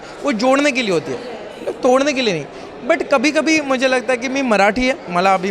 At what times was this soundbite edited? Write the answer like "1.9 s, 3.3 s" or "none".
none